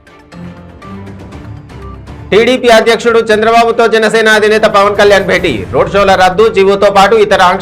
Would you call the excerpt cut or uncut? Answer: cut